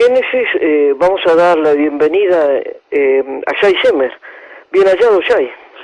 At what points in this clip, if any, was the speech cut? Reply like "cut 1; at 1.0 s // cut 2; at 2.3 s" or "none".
none